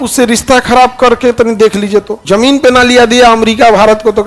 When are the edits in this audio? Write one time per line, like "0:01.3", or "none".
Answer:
0:02.1